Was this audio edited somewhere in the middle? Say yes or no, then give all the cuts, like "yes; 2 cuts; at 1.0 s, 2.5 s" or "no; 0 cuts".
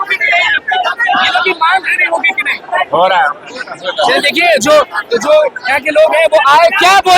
no; 0 cuts